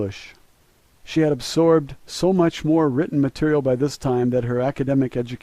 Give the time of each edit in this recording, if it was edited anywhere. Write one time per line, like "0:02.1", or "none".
0:03.6